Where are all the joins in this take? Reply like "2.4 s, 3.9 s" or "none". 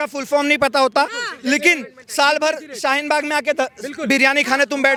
none